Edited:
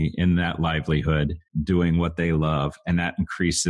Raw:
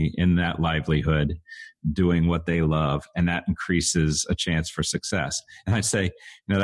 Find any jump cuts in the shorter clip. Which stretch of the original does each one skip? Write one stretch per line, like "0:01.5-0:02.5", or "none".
0:01.5-0:01.7